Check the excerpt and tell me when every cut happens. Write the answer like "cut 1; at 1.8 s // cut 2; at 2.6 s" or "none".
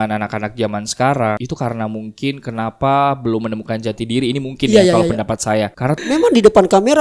cut 1; at 6.0 s